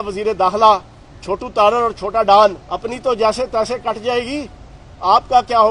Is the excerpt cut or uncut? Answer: cut